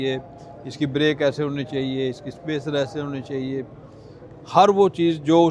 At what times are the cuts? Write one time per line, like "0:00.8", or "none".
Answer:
none